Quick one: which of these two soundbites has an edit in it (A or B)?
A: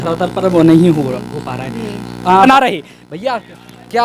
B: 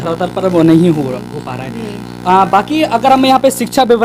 A